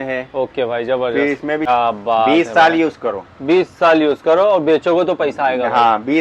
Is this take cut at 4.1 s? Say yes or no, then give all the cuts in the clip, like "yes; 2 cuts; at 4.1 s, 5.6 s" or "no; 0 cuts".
no; 1 cut; at 1.7 s